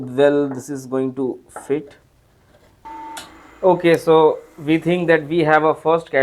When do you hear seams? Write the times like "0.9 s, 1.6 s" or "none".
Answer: 2.8 s